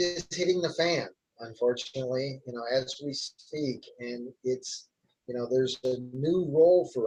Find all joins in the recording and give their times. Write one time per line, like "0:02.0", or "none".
none